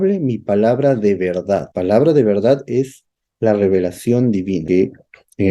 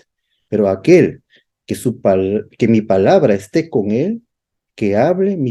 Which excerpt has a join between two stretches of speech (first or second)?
first